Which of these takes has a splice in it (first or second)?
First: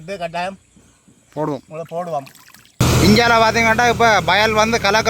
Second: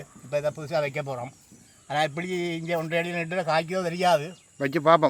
first